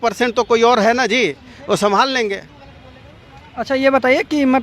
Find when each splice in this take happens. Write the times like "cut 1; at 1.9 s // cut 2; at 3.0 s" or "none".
none